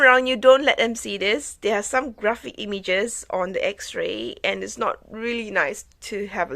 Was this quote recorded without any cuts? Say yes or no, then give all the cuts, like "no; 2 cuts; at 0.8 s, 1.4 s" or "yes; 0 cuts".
yes; 0 cuts